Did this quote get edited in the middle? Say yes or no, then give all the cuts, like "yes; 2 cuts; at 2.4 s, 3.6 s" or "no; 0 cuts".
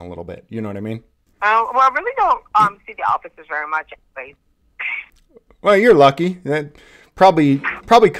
yes; 1 cut; at 1.2 s